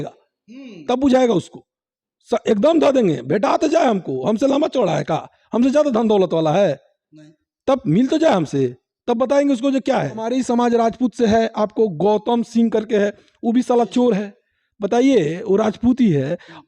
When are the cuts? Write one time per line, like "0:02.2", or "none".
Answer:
0:10.2